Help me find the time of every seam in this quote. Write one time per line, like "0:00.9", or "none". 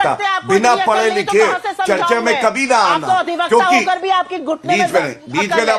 none

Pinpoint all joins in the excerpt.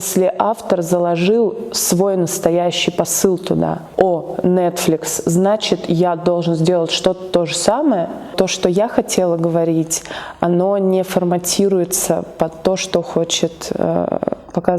0:03.8
0:08.3

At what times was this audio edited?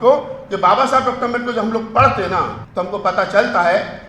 0:02.6

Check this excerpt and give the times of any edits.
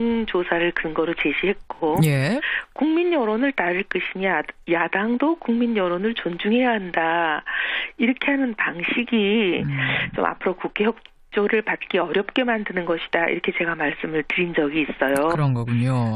0:08.1

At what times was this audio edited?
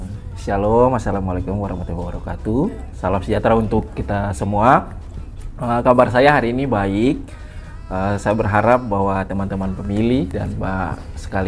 none

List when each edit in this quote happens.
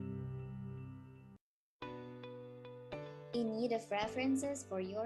0:01.3

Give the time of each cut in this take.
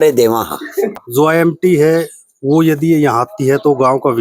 0:00.9

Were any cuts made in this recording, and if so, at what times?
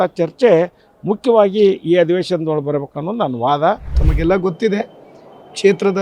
0:04.0

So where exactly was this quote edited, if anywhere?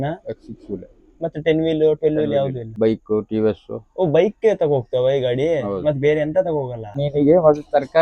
0:02.6
0:07.0

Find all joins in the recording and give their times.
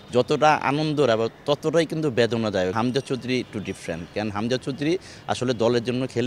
0:02.7

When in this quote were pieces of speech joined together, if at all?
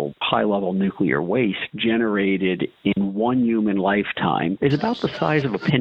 0:04.6

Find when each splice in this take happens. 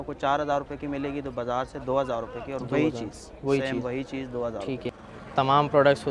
0:04.9

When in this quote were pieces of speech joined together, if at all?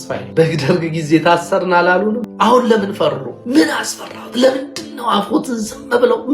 0:03.4

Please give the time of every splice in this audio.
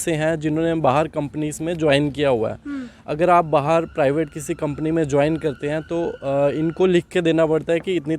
none

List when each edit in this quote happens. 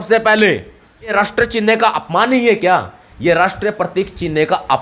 0:01.1

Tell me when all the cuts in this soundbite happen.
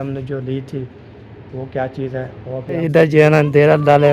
0:02.8

